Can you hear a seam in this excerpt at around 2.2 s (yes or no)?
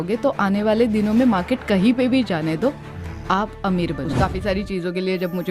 no